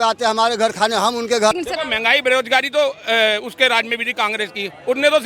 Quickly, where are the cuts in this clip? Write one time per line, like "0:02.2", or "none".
0:01.5